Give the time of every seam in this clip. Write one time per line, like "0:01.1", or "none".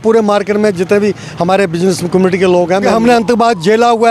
0:02.9